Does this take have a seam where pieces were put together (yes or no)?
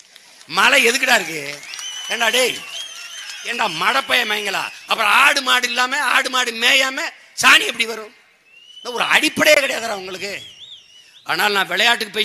yes